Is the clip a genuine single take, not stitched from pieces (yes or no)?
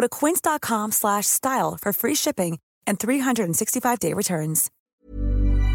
no